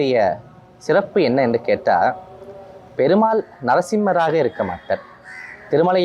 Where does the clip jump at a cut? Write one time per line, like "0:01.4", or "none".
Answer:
none